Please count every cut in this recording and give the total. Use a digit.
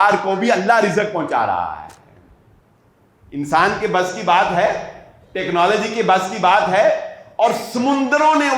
0